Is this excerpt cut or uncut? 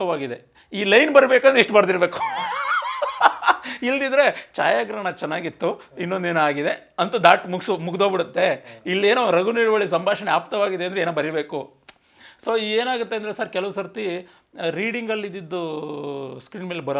uncut